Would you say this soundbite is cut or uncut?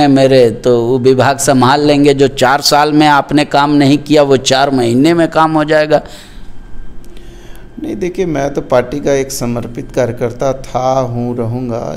uncut